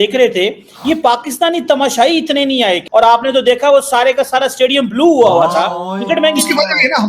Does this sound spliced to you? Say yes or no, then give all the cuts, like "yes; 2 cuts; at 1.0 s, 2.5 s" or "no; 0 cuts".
yes; 1 cut; at 5.9 s